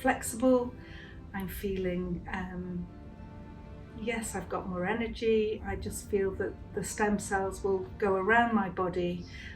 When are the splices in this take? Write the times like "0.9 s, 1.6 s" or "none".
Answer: 5.6 s